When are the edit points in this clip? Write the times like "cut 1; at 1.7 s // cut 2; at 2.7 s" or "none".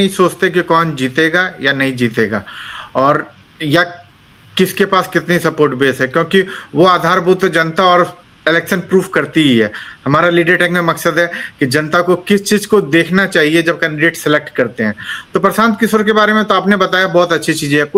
none